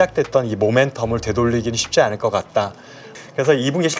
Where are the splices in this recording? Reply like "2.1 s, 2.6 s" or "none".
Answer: 3.1 s

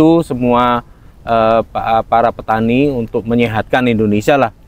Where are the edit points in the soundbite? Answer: none

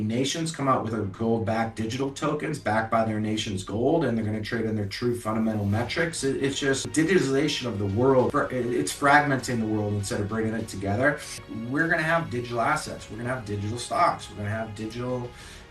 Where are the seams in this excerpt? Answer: 6.9 s, 11.4 s

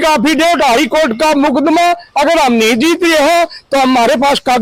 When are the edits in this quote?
none

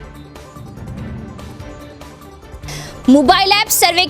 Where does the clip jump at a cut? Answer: 2.0 s

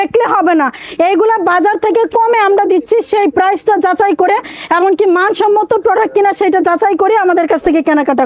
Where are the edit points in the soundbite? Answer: none

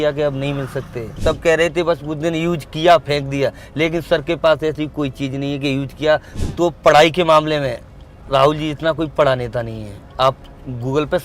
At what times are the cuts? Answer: 1.1 s, 6.4 s

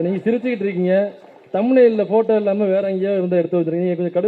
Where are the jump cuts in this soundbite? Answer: none

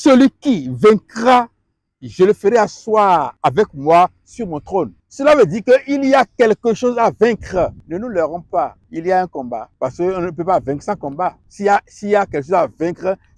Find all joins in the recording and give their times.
3.3 s, 5.0 s, 7.8 s, 8.8 s, 9.7 s, 11.5 s

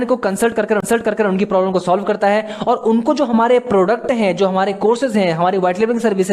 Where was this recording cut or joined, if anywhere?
1.8 s

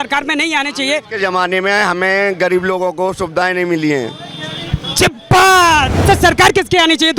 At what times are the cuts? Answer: 5.9 s

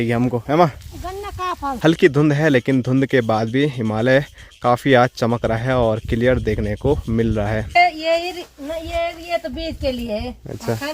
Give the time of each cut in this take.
1.6 s, 7.8 s

